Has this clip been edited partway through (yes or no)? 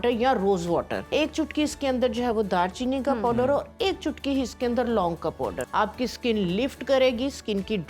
yes